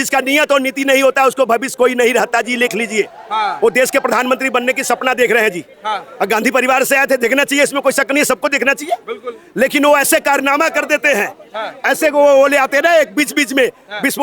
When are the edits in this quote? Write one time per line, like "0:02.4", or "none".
none